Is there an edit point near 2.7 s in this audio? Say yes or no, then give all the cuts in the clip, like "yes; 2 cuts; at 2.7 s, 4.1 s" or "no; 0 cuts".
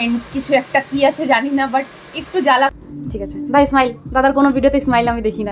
yes; 1 cut; at 2.7 s